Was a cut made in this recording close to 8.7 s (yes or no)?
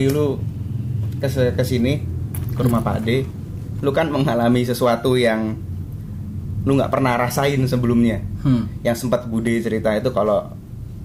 no